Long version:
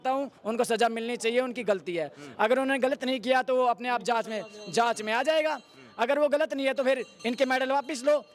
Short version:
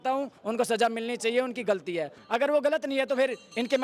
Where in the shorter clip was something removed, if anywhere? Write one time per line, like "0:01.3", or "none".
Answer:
0:02.2